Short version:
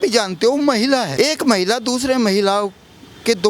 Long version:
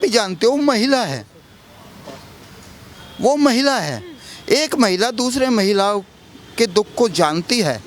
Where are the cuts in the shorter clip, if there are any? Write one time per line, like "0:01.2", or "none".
0:01.1

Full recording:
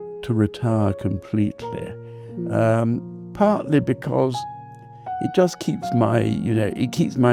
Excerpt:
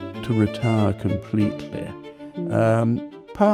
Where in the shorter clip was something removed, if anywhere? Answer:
none

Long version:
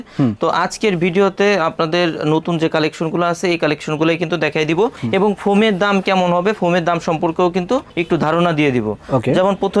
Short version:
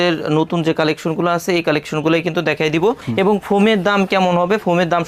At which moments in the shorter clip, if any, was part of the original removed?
none

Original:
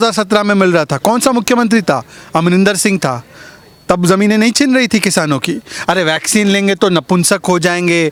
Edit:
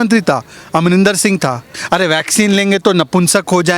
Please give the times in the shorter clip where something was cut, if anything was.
0:01.7

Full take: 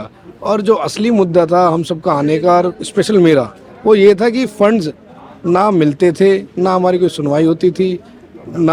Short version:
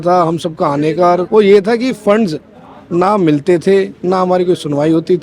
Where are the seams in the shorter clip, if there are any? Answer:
0:01.2

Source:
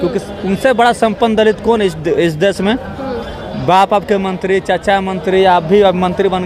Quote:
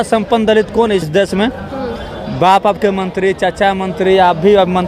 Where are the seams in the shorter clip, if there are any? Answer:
0:01.1

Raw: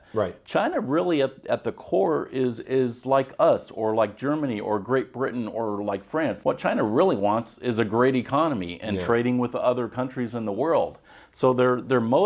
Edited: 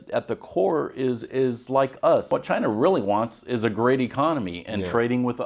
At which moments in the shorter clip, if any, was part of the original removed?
0:02.3

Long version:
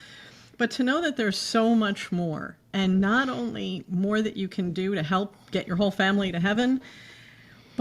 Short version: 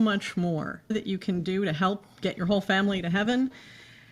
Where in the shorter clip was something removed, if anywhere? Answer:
0:00.9

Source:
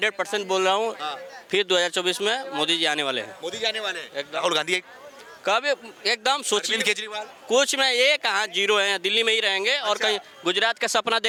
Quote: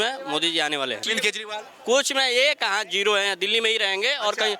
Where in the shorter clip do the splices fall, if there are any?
0:01.1

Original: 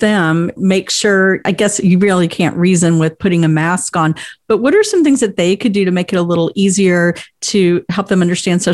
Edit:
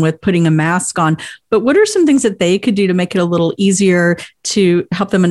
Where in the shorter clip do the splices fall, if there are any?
none

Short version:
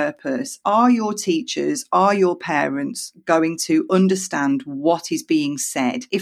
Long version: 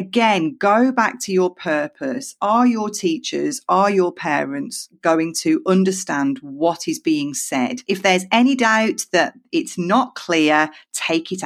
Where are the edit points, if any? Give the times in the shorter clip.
none

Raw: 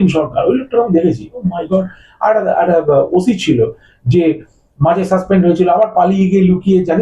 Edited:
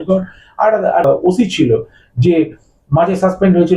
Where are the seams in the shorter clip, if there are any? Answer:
0:01.0

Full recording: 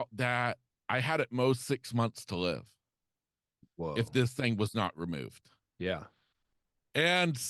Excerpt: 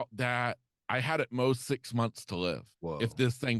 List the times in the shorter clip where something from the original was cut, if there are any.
0:02.7

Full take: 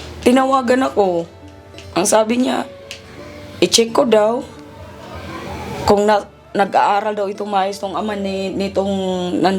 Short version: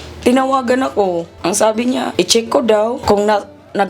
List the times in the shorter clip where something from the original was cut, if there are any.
0:01.3
0:02.1
0:03.0

